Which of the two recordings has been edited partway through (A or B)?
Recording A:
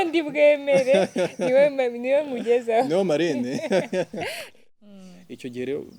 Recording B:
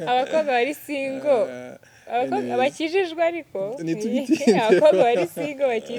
A